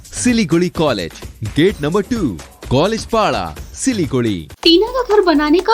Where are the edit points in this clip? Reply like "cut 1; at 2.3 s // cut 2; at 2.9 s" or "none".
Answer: cut 1; at 4.5 s

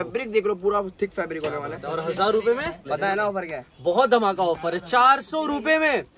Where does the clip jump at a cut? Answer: cut 1; at 2.8 s

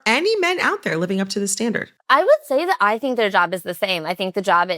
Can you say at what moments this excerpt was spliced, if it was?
cut 1; at 1.9 s

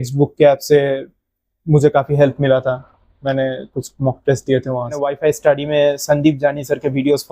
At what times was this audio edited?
cut 1; at 5.0 s

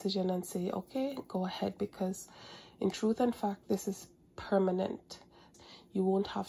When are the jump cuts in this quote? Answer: cut 1; at 5.5 s

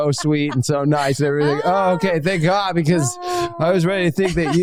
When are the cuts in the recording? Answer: none

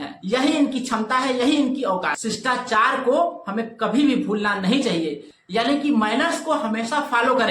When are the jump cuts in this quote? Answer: cut 1; at 2.2 s

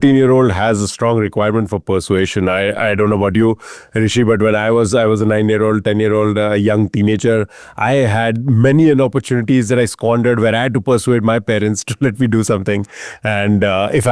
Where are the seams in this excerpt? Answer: none

